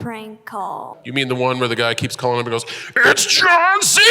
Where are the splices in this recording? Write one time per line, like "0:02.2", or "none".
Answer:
0:00.9